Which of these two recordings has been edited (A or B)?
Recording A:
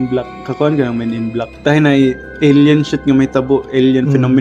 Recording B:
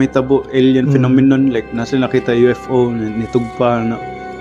A